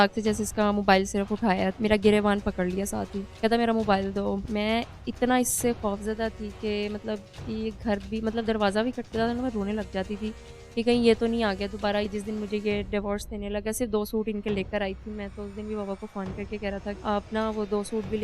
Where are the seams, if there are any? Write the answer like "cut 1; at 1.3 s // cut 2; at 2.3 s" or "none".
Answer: cut 1; at 1.7 s // cut 2; at 3.2 s // cut 3; at 4.4 s // cut 4; at 12.1 s // cut 5; at 17.0 s